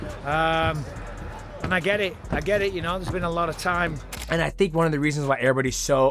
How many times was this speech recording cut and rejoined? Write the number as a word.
one